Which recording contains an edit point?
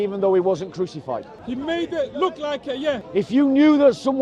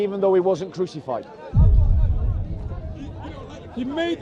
first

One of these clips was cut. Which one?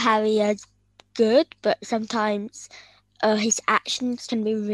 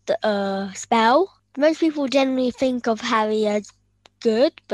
second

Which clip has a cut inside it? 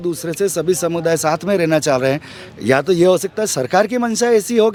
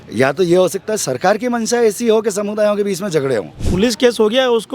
second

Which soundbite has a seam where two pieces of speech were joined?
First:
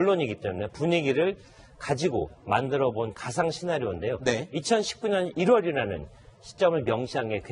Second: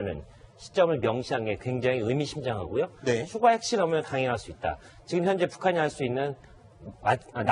first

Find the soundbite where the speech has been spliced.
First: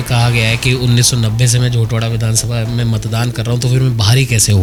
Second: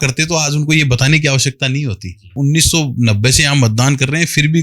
second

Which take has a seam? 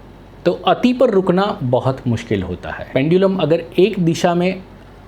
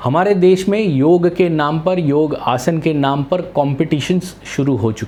first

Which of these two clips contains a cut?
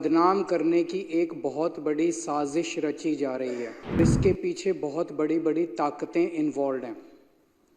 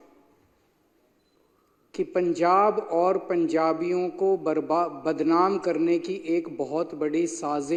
first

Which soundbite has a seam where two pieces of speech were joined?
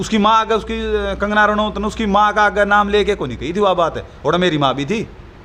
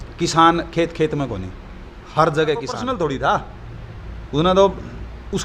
second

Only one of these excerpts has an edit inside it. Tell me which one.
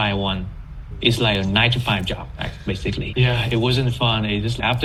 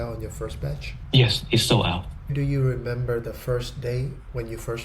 second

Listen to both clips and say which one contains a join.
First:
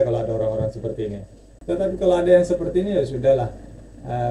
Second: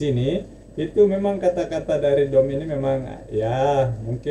first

